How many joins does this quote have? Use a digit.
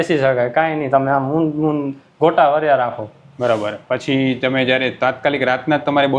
0